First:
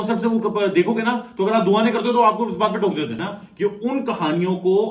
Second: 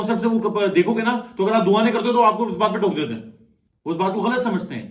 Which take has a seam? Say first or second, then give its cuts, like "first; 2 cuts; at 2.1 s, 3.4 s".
first; 1 cut; at 3.4 s